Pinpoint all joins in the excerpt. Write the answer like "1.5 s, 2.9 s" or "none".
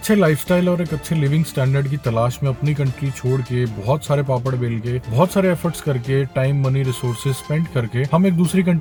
none